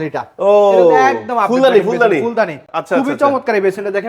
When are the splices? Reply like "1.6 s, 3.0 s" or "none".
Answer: none